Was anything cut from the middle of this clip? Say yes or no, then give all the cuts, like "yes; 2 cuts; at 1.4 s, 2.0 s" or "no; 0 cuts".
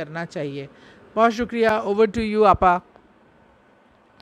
no; 0 cuts